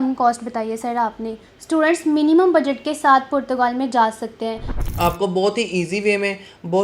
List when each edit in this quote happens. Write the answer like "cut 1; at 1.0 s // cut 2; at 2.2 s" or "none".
cut 1; at 4.7 s